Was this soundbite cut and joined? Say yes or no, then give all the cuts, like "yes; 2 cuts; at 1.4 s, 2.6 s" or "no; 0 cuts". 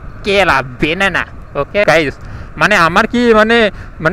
yes; 1 cut; at 1.9 s